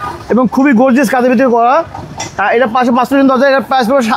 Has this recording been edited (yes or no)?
no